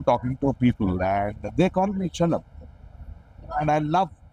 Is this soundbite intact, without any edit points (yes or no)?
yes